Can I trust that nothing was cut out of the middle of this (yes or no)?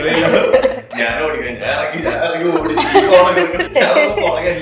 no